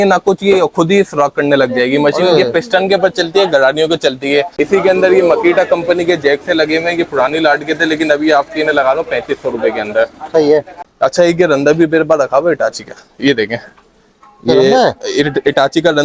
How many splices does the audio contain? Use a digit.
2